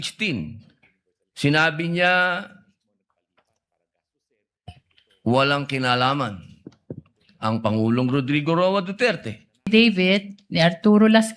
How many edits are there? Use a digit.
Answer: 1